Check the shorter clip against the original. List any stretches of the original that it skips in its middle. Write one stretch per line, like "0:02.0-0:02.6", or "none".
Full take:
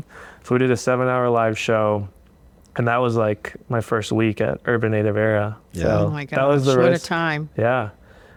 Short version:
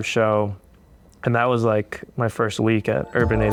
none